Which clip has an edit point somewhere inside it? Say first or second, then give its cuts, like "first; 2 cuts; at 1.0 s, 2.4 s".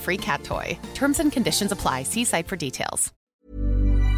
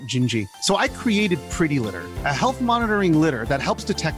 first; 1 cut; at 3.2 s